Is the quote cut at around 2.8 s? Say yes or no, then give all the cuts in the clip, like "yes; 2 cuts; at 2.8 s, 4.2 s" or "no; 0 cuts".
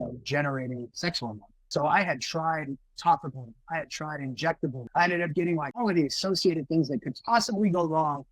no; 3 cuts; at 1.5 s, 4.8 s, 5.8 s